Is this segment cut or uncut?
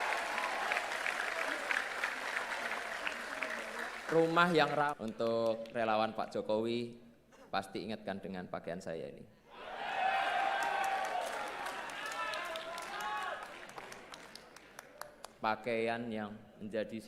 cut